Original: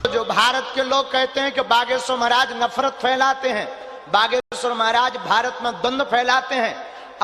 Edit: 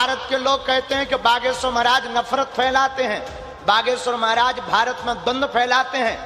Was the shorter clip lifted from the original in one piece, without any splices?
no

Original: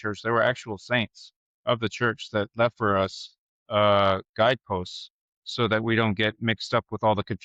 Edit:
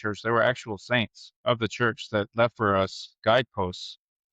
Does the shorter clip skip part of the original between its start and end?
yes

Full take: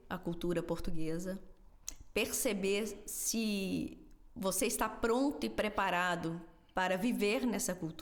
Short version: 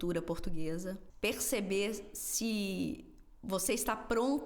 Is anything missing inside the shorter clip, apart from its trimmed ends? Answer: yes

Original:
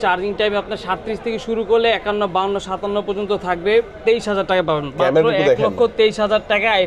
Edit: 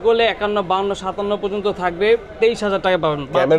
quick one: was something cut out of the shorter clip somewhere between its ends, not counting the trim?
no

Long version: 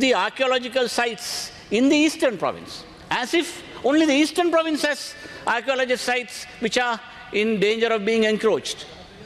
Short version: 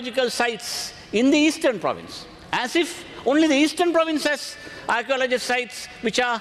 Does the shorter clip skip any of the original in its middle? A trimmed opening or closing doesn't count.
no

